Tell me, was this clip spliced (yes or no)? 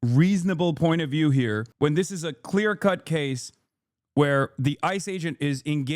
yes